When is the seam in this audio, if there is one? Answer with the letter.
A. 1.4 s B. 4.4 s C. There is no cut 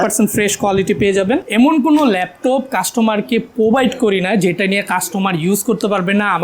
A